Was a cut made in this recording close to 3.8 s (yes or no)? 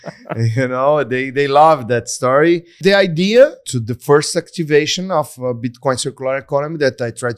yes